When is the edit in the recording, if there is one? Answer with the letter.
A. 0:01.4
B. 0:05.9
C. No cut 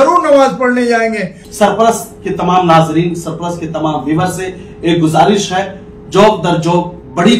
A